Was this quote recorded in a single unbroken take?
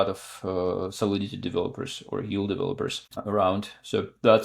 no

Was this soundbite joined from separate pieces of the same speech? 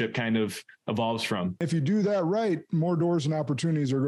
yes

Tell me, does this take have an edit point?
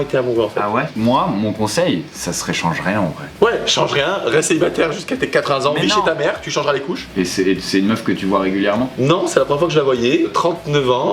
yes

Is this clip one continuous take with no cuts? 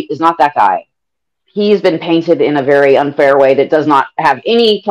no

